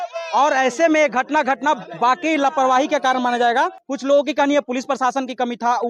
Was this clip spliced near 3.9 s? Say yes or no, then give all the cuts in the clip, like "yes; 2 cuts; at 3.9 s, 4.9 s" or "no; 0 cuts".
yes; 1 cut; at 3.9 s